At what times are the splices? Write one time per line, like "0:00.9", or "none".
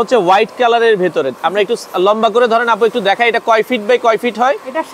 none